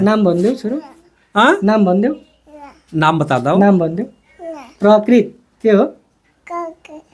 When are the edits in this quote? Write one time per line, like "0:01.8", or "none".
none